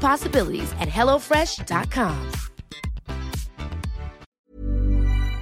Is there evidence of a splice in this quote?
yes; 1 cut; at 4.2 s

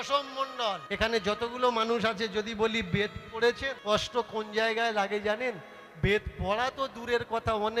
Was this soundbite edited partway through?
yes; 2 cuts; at 0.8 s, 3.7 s

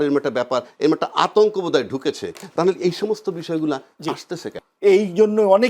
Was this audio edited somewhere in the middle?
yes; 1 cut; at 4.5 s

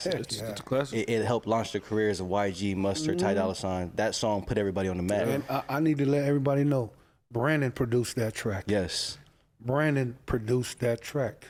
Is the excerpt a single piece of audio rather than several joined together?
yes; 0 cuts

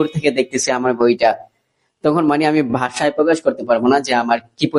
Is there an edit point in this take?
no; 0 cuts

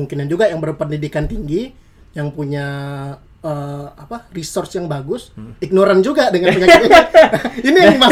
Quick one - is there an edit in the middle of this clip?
no; 0 cuts

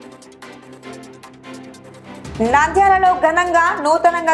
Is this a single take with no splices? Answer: no; 1 cut; at 1.1 s

